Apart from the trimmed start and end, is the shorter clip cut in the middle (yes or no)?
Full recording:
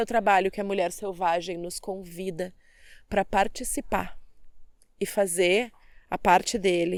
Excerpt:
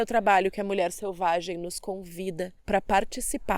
yes